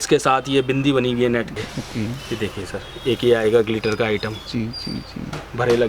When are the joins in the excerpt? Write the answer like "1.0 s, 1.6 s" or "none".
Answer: 1.5 s

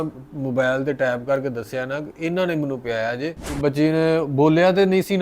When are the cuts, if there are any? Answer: 3.6 s

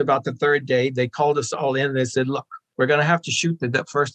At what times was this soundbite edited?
none

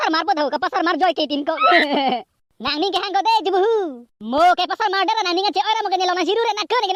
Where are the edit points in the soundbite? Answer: none

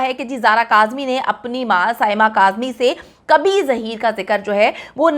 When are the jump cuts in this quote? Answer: none

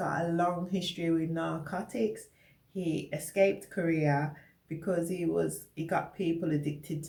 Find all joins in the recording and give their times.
none

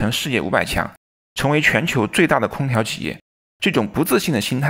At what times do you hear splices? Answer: 3.4 s

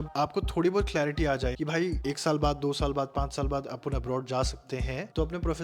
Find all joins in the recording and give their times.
1.5 s

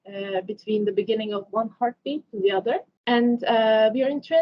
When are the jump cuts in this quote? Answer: 2.9 s

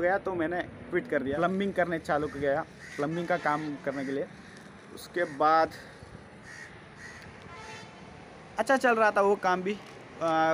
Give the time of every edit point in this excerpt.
none

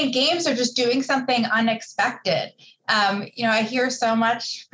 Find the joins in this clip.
none

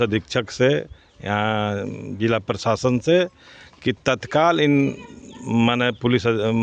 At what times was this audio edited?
none

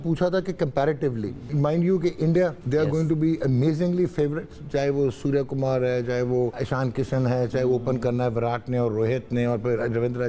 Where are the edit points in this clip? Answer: 1.5 s, 2.6 s, 6.6 s

